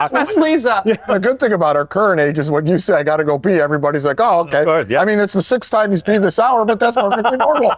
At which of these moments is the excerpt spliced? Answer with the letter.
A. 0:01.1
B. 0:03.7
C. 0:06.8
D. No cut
A